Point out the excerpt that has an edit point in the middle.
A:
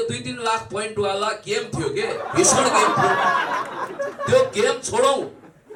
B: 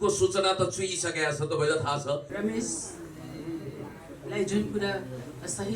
B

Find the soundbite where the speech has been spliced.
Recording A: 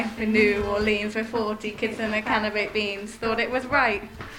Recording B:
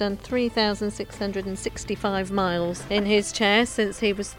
B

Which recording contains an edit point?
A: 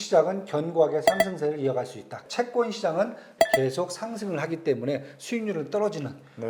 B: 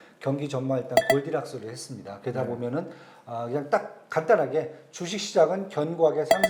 A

